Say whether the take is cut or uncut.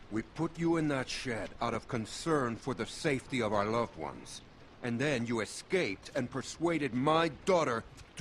cut